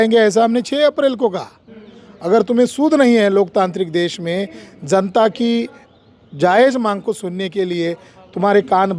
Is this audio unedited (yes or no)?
yes